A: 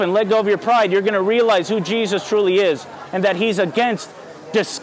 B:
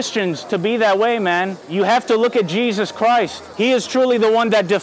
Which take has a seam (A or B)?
B